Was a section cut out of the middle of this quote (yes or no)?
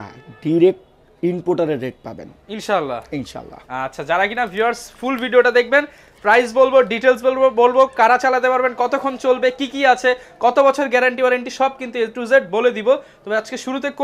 no